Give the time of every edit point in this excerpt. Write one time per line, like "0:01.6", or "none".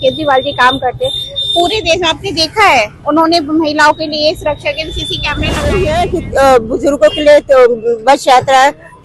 0:05.7